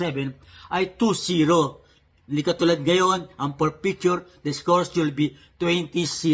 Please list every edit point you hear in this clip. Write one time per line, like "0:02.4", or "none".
0:05.0